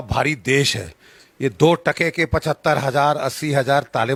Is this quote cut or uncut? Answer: uncut